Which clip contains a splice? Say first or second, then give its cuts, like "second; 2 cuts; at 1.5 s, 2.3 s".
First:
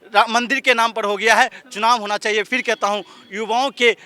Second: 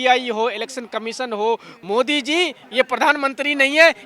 second; 1 cut; at 1.7 s